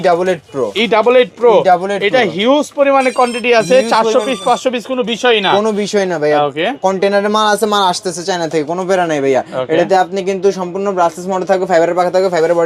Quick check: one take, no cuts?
yes; 0 cuts

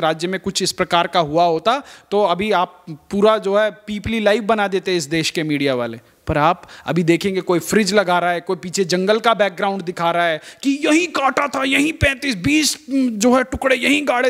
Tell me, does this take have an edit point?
no; 0 cuts

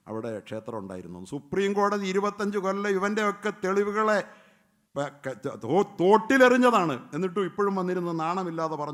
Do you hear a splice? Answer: no; 0 cuts

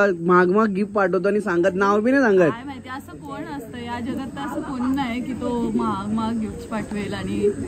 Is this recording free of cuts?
yes; 0 cuts

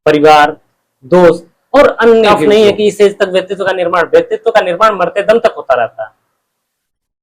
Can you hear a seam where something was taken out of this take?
yes; 1 cut; at 2.4 s

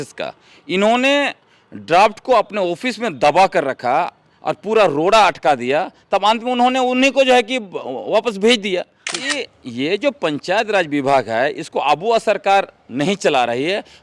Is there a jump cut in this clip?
yes; 1 cut; at 9.4 s

